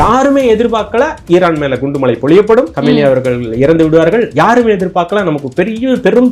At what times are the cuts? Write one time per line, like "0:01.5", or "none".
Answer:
0:01.2
0:02.7